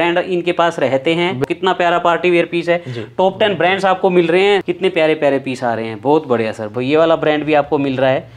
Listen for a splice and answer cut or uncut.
cut